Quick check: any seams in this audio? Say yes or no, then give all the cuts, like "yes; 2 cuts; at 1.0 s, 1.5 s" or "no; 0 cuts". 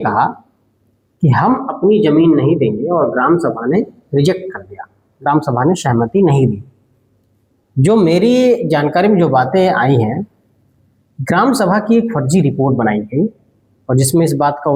no; 0 cuts